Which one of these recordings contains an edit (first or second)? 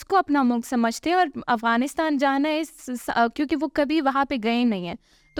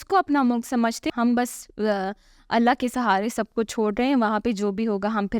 second